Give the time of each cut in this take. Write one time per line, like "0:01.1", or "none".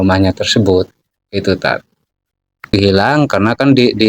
0:02.7